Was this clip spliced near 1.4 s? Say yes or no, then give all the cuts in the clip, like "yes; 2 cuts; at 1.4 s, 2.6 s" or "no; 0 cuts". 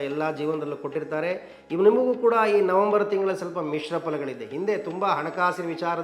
no; 0 cuts